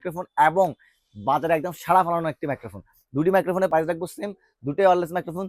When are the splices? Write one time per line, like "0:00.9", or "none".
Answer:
0:03.7